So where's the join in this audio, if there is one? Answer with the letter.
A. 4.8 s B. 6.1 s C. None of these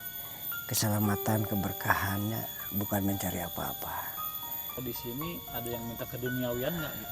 A